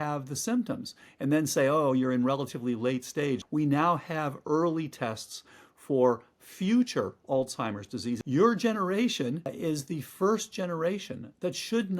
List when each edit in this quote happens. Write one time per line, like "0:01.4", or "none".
0:03.4
0:08.2
0:09.5